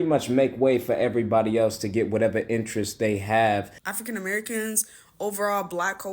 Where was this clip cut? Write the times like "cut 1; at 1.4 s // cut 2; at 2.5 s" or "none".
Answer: cut 1; at 3.8 s